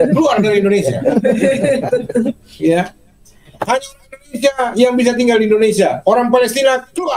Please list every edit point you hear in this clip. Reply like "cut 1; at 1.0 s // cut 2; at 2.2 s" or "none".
cut 1; at 2.5 s

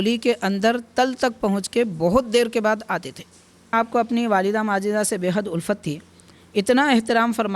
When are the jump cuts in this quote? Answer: cut 1; at 3.7 s

